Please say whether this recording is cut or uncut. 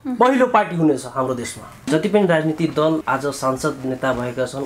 cut